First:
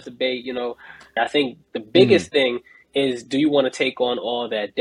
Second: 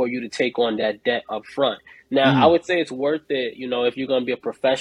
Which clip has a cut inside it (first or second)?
first